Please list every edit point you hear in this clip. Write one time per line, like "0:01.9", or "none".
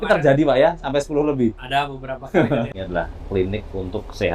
0:02.7